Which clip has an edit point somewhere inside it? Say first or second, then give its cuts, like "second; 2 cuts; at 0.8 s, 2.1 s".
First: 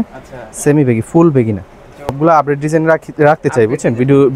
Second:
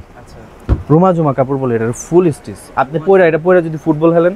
first; 1 cut; at 2.2 s